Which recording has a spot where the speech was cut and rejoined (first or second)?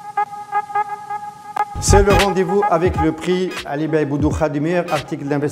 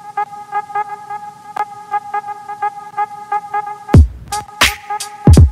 second